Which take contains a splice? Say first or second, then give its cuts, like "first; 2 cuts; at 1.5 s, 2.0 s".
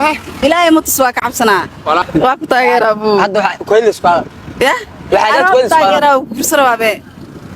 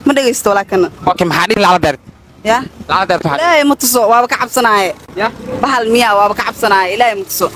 first; 1 cut; at 2.1 s